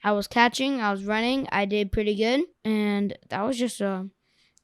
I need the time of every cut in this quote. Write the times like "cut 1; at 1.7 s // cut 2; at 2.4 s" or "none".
cut 1; at 2.5 s

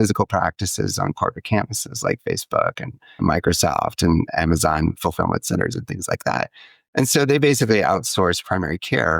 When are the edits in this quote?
cut 1; at 3.2 s

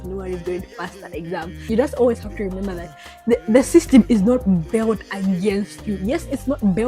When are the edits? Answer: cut 1; at 1.6 s

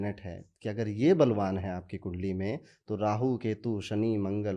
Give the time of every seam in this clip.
none

